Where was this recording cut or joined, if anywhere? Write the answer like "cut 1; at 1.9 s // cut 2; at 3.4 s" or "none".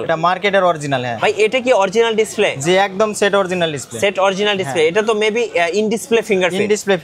cut 1; at 1.1 s